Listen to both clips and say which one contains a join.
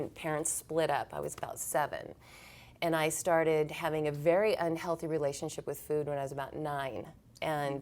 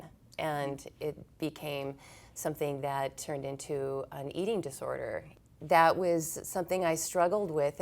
second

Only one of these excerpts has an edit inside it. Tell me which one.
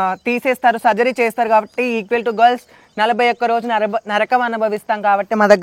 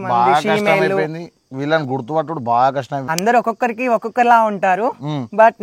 second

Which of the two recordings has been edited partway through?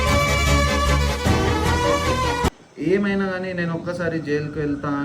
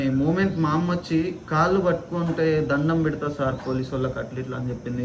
first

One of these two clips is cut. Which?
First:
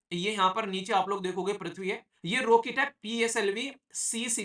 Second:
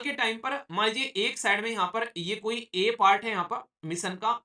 first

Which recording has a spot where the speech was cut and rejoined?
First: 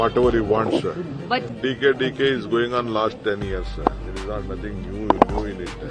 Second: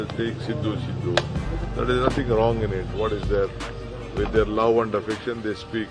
first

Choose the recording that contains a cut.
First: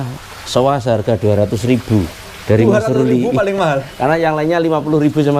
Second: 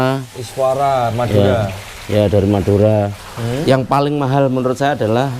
second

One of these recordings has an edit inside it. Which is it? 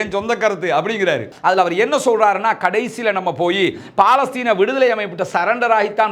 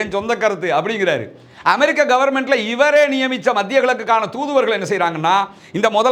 first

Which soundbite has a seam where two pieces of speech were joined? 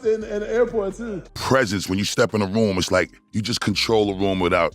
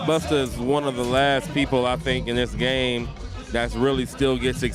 first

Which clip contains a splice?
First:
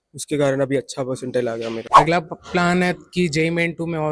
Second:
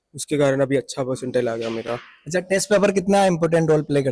first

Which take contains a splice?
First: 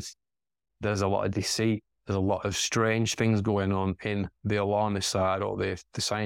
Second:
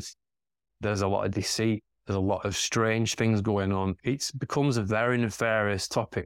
second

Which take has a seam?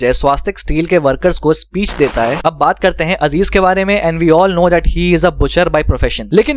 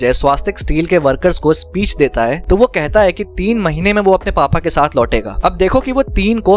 first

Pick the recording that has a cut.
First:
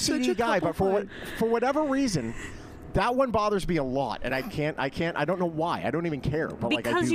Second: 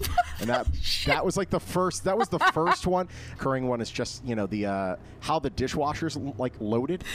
second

